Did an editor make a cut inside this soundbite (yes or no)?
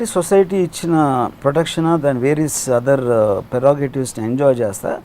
yes